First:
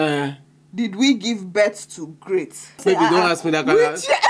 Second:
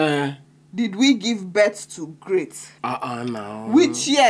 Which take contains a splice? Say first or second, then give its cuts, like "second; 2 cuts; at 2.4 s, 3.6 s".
first; 1 cut; at 2.8 s